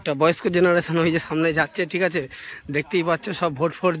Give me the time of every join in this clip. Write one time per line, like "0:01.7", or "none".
none